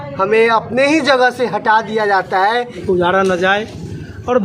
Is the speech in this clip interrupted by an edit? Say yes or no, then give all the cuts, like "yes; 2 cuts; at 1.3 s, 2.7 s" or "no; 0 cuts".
yes; 1 cut; at 2.8 s